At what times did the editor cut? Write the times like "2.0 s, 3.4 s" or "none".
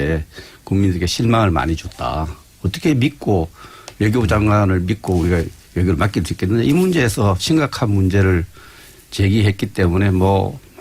7.2 s